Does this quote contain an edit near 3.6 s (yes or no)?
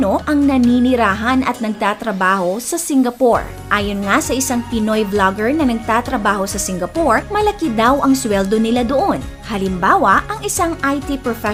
no